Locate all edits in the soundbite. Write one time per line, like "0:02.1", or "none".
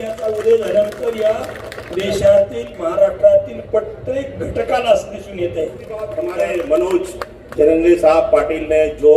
0:06.2

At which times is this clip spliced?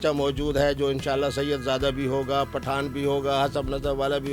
none

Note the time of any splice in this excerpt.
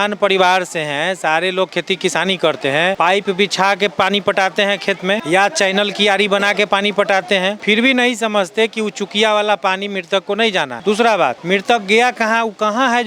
0:03.0
0:05.2
0:07.6
0:10.7
0:11.4

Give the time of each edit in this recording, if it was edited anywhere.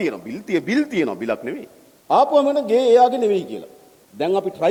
none

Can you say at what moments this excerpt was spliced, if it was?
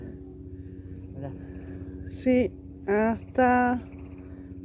none

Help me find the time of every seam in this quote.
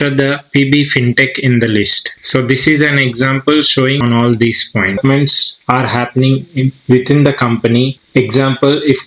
0:04.0
0:05.0

